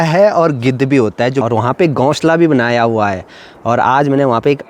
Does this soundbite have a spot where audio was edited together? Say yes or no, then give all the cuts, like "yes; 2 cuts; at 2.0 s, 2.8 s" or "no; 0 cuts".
yes; 1 cut; at 1.4 s